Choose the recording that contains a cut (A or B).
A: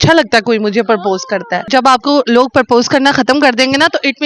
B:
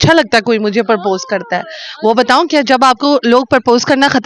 A